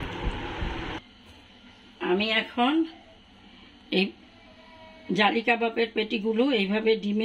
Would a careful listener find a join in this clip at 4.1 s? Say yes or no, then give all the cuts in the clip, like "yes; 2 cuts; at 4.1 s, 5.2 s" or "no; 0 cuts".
no; 1 cut; at 1.0 s